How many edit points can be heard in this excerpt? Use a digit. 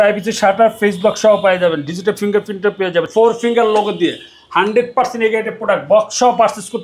1